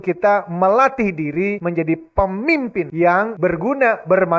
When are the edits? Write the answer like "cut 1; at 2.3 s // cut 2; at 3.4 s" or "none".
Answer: cut 1; at 1.6 s // cut 2; at 3.2 s

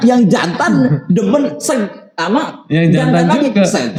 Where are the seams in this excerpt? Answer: none

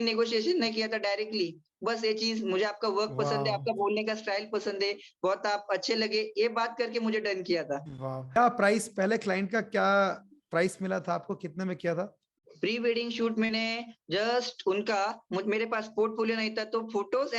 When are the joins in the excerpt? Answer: cut 1; at 8.4 s

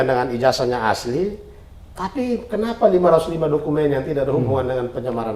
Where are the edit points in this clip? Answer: none

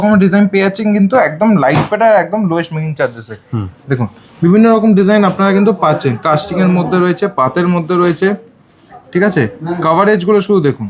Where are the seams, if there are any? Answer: none

